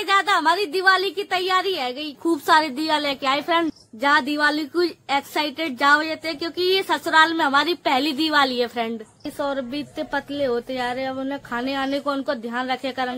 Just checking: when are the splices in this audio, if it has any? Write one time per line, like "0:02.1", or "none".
0:02.1
0:03.8
0:09.3